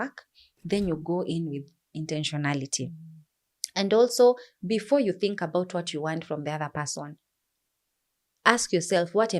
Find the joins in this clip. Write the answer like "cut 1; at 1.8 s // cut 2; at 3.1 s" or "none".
none